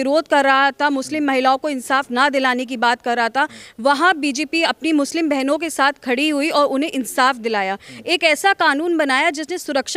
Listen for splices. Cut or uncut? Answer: uncut